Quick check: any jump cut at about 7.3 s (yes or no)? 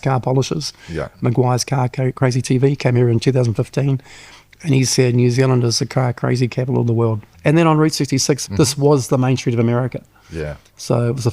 yes